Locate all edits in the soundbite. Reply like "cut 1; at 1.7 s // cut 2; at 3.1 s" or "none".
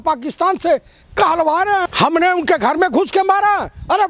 cut 1; at 1.8 s